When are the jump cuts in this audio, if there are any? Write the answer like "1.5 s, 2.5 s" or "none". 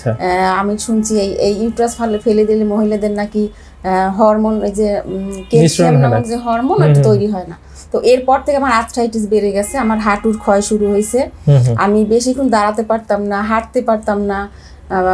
none